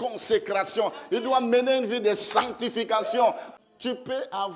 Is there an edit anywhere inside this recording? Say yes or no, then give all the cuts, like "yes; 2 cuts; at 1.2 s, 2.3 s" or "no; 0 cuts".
yes; 1 cut; at 3.5 s